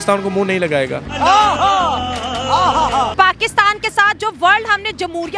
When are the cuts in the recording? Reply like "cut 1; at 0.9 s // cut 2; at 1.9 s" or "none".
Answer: cut 1; at 1.0 s // cut 2; at 3.1 s

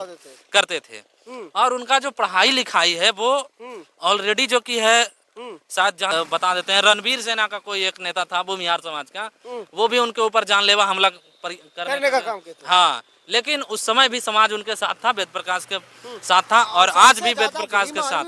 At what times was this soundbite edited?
cut 1; at 6.1 s

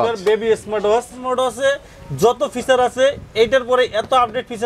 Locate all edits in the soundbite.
cut 1; at 1.1 s

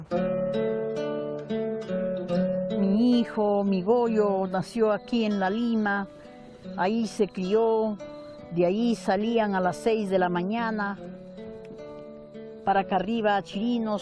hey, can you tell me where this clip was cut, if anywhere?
cut 1; at 9.9 s

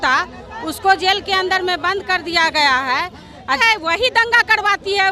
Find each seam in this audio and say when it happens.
cut 1; at 3.5 s

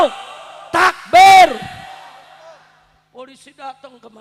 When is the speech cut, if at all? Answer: none

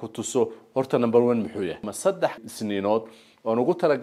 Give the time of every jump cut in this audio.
cut 1; at 2.4 s

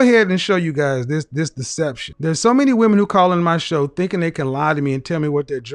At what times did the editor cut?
cut 1; at 2.1 s

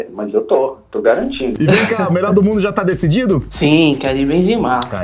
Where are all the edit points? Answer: cut 1; at 1.5 s

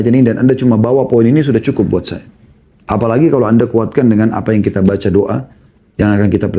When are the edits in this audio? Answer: none

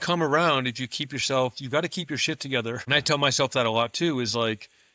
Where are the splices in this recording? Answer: cut 1; at 2.8 s

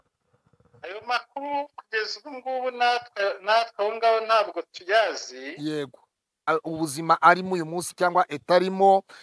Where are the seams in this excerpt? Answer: cut 1; at 6.5 s

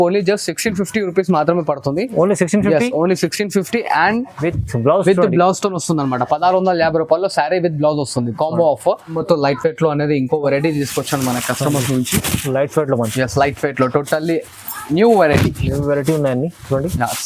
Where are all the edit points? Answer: cut 1; at 9.1 s

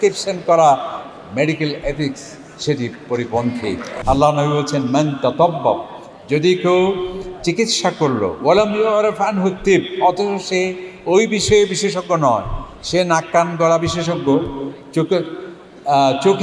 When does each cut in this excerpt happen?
cut 1; at 3.9 s

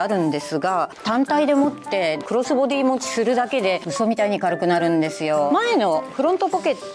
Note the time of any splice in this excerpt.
none

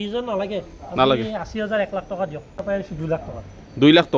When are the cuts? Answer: cut 1; at 2.6 s

